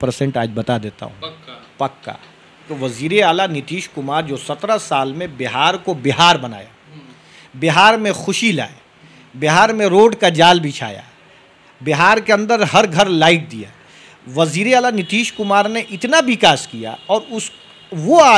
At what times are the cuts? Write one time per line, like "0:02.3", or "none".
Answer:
0:02.7